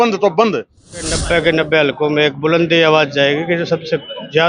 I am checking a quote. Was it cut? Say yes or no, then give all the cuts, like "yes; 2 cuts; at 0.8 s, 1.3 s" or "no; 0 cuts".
yes; 1 cut; at 1.2 s